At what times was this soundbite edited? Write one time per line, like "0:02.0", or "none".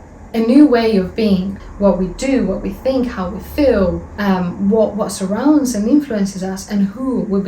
0:01.6
0:04.1